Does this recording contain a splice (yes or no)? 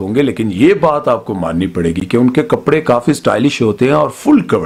no